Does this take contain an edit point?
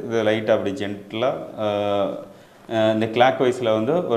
no; 0 cuts

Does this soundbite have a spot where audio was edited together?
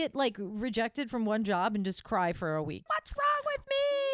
yes; 1 cut; at 2.9 s

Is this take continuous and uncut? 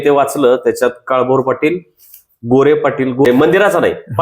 no; 1 cut; at 3.2 s

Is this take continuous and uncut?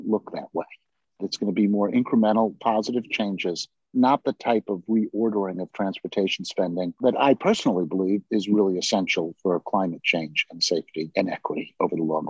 no; 2 cuts; at 1.2 s, 11.1 s

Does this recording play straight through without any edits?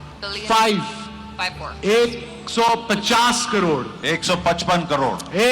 no; 1 cut; at 3.9 s

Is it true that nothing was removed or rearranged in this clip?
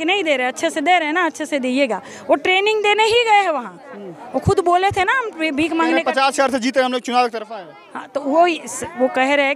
yes; 0 cuts

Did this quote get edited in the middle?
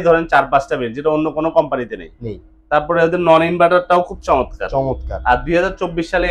no; 0 cuts

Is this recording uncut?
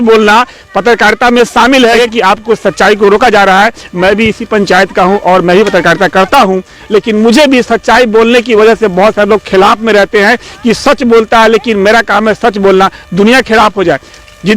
no; 1 cut; at 1.9 s

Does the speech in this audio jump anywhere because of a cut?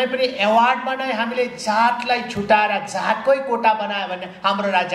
no; 0 cuts

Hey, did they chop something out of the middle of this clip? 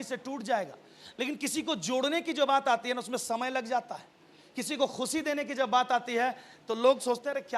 no; 0 cuts

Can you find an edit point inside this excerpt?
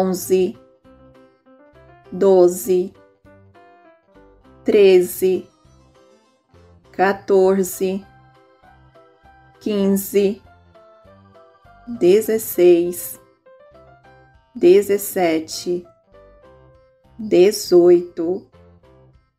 yes; 2 cuts; at 5.6 s, 6.9 s

